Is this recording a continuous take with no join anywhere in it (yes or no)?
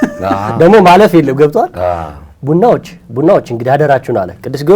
yes